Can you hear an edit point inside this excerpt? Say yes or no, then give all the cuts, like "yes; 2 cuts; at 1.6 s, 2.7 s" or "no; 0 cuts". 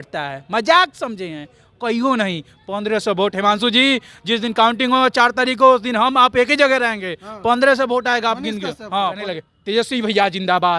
yes; 1 cut; at 9.2 s